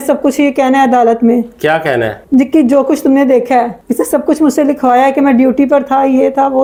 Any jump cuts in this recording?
no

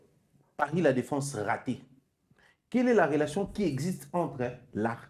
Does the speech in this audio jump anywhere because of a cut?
no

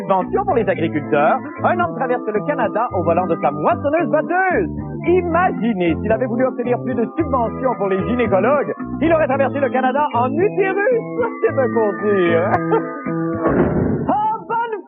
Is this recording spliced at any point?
no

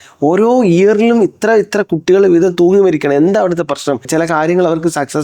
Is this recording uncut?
no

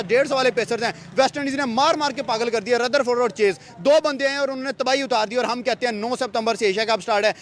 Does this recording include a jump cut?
no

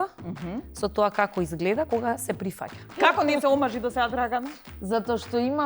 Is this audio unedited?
no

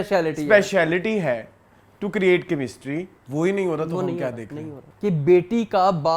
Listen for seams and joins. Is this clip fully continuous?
no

